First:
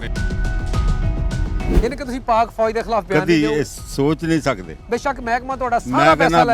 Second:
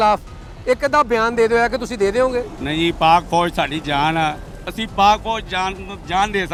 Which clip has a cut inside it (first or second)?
first